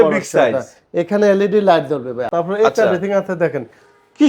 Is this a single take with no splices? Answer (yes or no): no